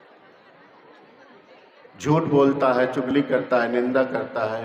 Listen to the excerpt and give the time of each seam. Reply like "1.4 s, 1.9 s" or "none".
none